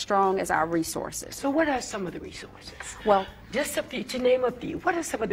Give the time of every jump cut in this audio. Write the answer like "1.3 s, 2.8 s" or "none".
none